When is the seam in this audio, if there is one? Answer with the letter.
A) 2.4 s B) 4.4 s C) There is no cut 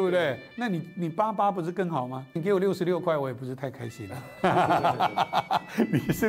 A